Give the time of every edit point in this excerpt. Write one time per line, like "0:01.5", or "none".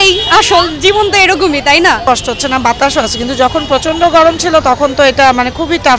none